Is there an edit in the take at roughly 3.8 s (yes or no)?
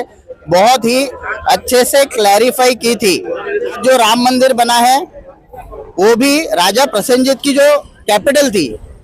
yes